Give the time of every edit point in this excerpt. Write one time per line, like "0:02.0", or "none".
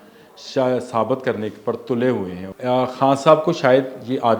0:02.4